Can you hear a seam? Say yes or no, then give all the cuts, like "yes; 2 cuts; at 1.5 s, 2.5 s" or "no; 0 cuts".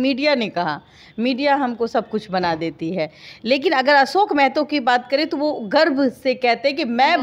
no; 0 cuts